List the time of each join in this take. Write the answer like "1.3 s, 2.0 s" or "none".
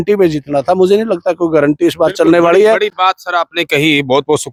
none